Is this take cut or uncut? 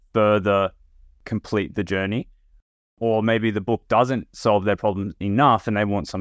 cut